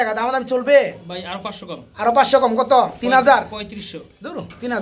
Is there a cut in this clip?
no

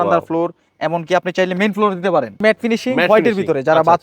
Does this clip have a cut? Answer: yes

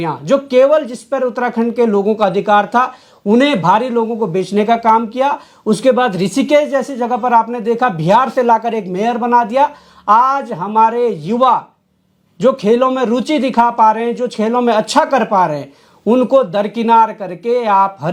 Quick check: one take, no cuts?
yes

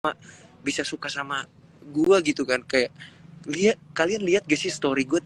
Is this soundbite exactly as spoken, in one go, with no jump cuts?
yes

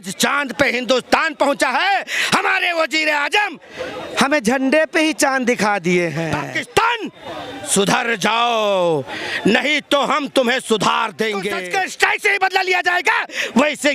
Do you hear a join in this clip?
yes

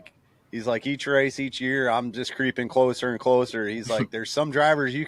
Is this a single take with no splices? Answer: yes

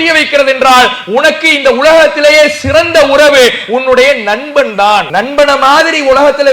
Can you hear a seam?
yes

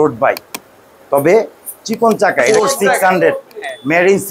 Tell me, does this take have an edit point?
yes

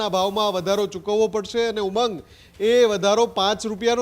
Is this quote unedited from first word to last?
yes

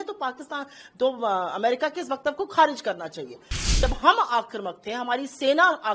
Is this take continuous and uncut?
no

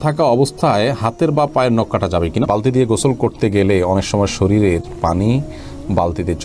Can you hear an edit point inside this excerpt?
yes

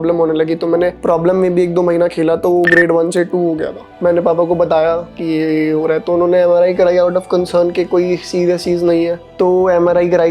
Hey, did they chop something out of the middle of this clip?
yes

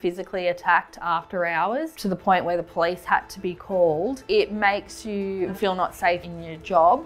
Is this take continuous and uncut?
no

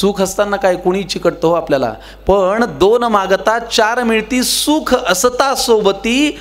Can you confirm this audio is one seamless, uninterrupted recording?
yes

